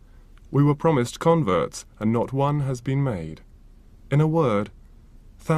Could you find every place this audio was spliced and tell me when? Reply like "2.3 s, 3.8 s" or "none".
2.3 s